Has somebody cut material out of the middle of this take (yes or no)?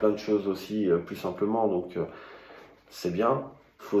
no